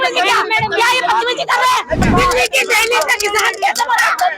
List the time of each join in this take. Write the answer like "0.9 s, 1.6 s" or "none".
2.0 s